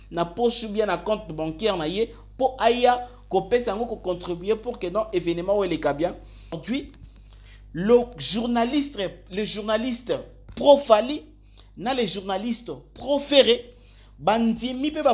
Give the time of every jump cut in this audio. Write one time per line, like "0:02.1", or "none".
0:06.6